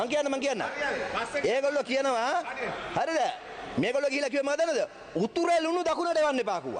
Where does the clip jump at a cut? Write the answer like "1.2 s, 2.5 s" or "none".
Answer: none

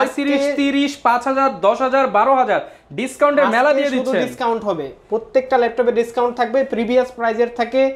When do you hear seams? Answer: none

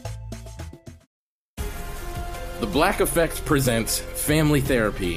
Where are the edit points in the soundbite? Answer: 1.1 s

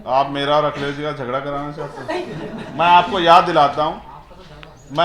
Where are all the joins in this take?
none

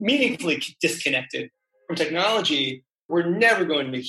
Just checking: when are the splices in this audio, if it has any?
3.0 s

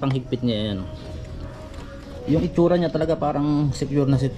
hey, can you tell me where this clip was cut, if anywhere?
2.2 s

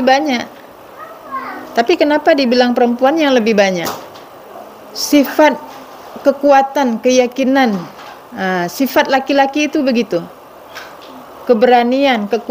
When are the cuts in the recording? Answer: none

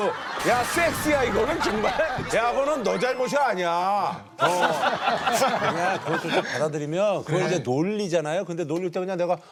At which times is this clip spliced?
none

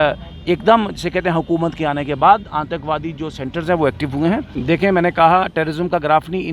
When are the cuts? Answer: 4.5 s

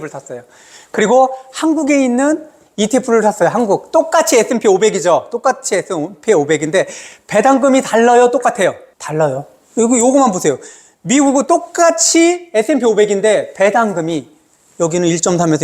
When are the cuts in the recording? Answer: none

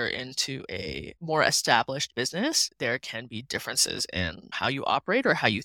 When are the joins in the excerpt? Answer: none

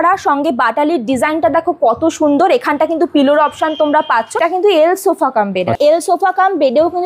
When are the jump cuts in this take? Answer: 4.4 s, 5.8 s

